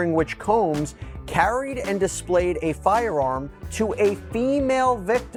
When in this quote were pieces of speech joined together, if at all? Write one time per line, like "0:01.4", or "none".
none